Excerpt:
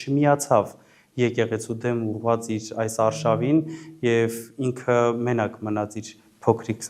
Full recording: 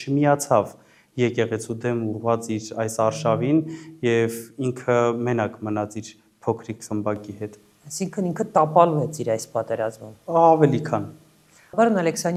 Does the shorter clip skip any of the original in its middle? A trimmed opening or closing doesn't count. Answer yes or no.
no